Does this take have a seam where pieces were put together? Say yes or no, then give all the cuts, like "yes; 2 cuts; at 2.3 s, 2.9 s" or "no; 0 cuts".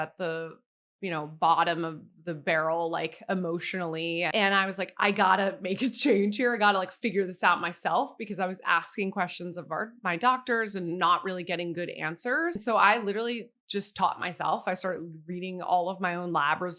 yes; 2 cuts; at 4.3 s, 12.6 s